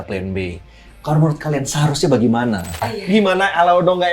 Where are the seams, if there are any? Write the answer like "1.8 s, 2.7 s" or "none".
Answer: 2.9 s